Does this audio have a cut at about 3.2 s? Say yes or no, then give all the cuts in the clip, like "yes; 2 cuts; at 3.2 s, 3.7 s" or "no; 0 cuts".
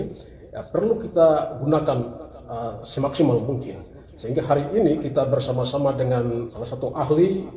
no; 1 cut; at 6.5 s